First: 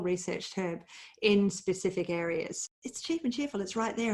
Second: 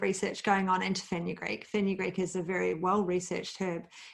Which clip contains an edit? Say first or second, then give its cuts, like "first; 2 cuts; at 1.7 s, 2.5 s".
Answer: first; 1 cut; at 2.6 s